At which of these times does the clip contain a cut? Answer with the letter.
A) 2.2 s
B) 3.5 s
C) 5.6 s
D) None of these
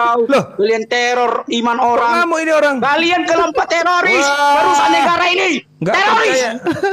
D